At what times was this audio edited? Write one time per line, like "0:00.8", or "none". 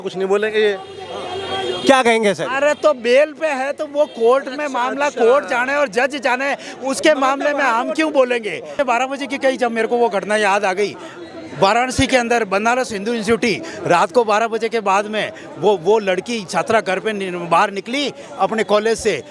0:08.6